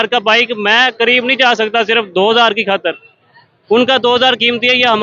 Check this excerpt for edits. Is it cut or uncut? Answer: uncut